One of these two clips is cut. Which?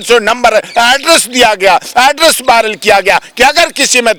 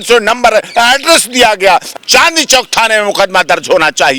second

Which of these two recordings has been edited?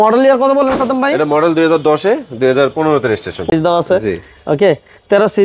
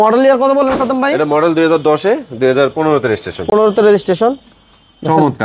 first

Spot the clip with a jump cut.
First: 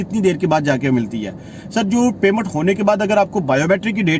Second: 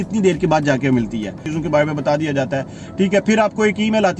second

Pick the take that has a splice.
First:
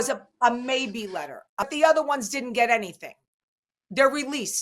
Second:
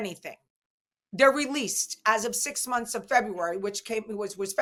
first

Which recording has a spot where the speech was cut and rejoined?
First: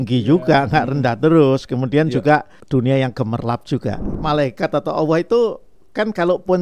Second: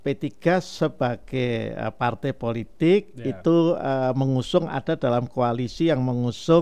first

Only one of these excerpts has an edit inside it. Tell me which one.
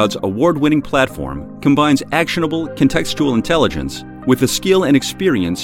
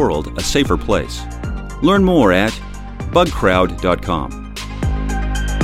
second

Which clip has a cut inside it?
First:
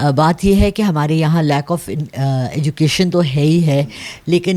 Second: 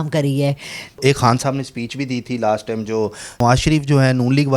second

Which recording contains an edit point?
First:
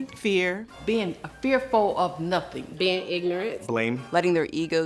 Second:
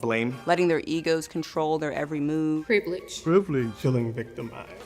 first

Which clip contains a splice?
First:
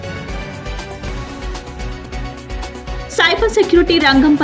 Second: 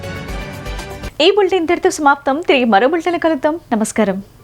first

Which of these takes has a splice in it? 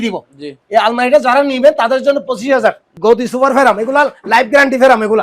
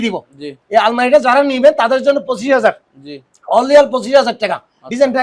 first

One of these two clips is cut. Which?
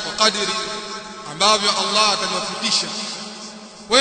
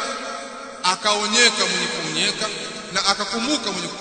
second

